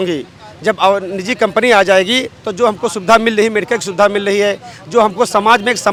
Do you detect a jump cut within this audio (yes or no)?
no